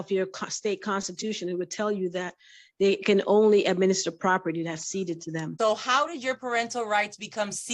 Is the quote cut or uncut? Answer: cut